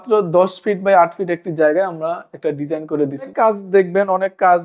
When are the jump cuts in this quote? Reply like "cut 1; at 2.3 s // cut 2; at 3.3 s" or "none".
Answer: cut 1; at 3.3 s